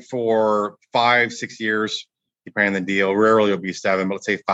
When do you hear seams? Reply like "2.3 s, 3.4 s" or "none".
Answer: none